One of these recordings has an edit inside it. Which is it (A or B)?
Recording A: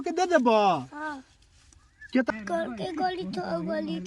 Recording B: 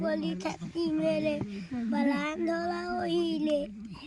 A